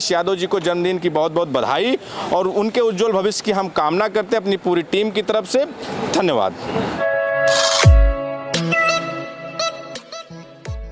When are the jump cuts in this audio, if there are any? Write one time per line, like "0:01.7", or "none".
none